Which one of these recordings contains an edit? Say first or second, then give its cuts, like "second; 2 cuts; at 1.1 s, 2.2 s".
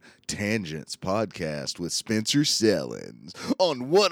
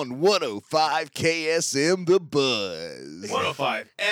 second; 1 cut; at 3.1 s